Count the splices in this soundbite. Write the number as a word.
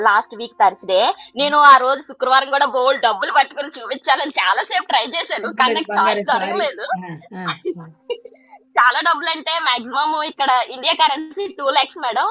zero